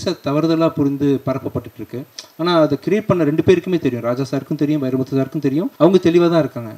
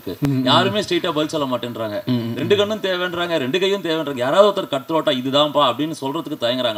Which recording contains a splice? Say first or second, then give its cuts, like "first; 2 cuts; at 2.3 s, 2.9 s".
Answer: first; 1 cut; at 5.7 s